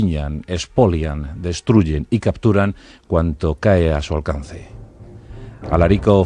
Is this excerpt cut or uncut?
uncut